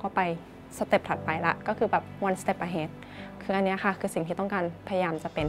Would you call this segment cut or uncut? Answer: uncut